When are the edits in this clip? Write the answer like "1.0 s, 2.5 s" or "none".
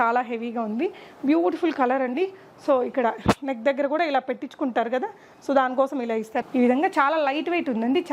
6.4 s